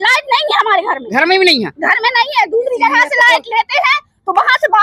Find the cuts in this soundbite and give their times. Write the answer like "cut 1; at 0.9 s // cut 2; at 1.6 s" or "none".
none